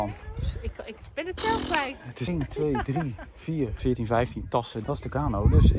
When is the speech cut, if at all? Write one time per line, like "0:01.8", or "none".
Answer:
0:02.3
0:03.8
0:04.7